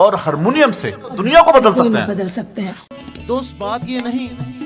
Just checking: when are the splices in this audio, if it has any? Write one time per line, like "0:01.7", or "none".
0:01.2
0:03.1